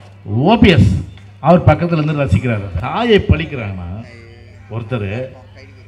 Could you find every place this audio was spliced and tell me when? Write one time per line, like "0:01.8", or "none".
0:02.7